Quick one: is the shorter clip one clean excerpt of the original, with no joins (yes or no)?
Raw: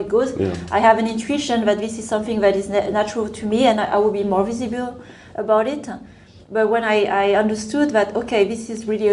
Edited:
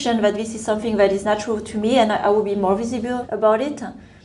no